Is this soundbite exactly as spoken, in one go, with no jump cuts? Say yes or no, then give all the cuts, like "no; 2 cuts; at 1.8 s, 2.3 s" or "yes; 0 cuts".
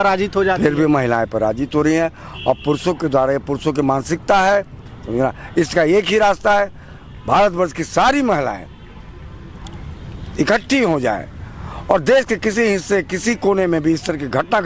yes; 0 cuts